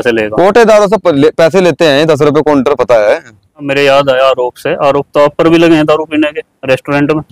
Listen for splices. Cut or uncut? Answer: cut